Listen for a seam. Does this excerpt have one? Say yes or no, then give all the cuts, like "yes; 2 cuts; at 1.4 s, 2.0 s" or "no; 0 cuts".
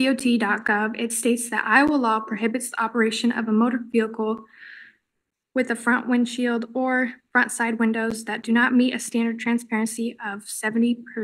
no; 0 cuts